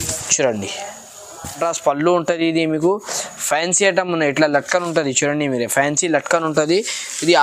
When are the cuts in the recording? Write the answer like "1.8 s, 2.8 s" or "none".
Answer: 1.6 s